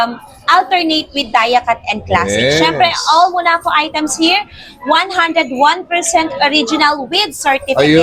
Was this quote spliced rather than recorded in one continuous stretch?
no; 0 cuts

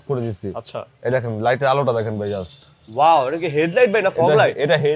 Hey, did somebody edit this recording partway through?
no; 0 cuts

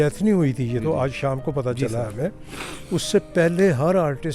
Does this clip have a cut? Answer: no; 0 cuts

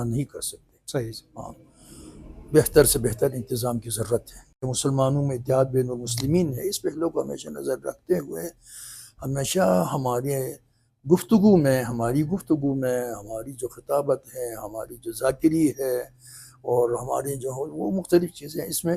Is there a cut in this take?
yes; 1 cut; at 4.7 s

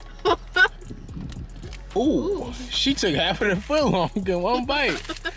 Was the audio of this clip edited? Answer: no; 0 cuts

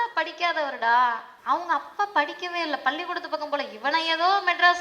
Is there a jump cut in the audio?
yes; 1 cut; at 1.3 s

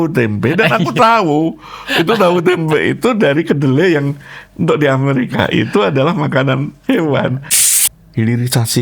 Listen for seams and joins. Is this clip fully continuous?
no; 1 cut; at 7.7 s

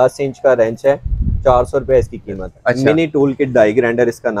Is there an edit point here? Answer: yes; 1 cut; at 2.5 s

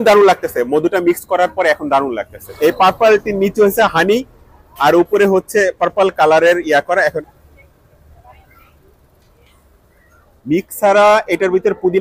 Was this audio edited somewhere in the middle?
yes; 2 cuts; at 2.5 s, 7.2 s

